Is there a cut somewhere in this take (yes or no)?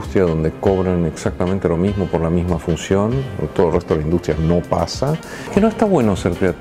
yes